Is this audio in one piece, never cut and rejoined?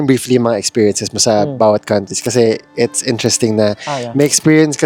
yes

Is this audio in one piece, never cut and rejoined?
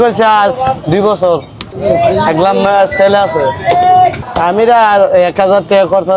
yes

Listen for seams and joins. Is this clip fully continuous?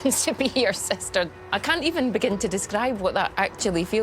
no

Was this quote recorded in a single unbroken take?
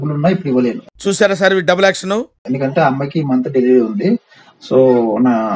yes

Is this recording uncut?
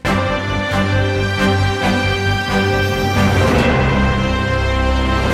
yes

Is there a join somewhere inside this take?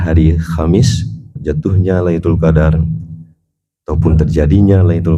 yes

